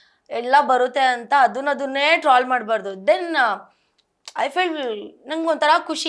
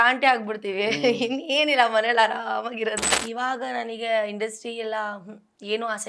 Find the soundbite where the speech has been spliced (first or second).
second